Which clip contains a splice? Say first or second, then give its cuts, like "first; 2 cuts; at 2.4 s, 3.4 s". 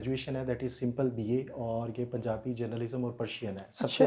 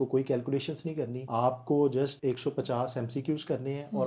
second; 2 cuts; at 1.2 s, 2.2 s